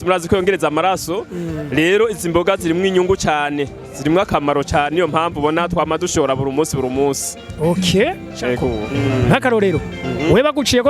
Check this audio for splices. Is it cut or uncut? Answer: cut